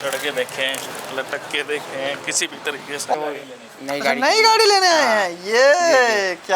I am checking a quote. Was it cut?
yes; 1 cut; at 3.1 s

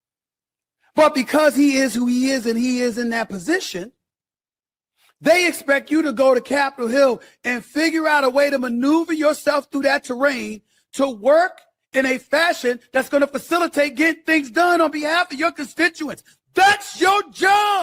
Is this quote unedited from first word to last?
yes; 0 cuts

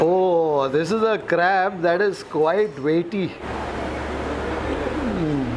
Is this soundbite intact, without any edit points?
no; 2 cuts; at 3.4 s, 4.7 s

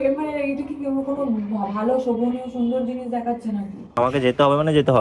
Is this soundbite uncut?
no; 1 cut; at 3.9 s

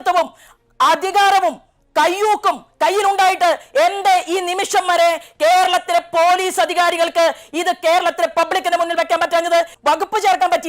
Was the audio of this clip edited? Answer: yes; 1 cut; at 9.7 s

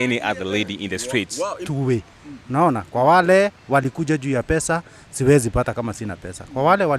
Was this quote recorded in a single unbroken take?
no; 1 cut; at 1.6 s

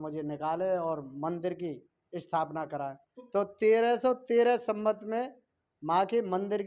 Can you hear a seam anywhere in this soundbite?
no; 0 cuts

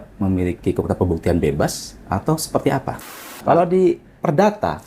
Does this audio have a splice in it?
yes; 1 cut; at 3.0 s

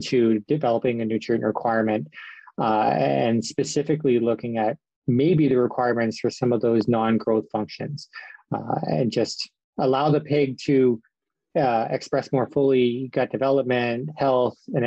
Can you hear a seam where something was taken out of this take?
no; 0 cuts

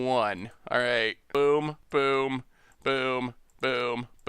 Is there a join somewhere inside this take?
yes; 2 cuts; at 1.2 s, 1.8 s

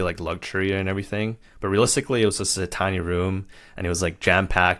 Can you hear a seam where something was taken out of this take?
no; 0 cuts

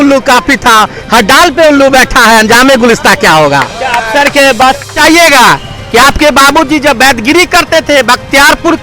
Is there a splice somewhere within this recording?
yes; 1 cut; at 4.9 s

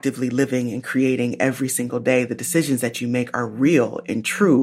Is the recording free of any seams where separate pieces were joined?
yes; 0 cuts

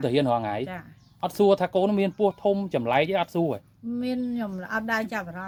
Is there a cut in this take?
no; 0 cuts

